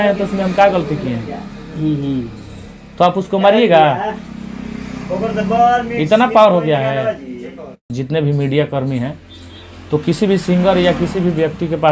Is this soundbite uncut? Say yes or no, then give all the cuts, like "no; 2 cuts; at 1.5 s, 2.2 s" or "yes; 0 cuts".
no; 1 cut; at 7.9 s